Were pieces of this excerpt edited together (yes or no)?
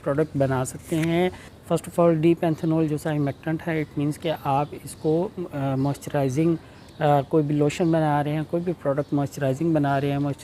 no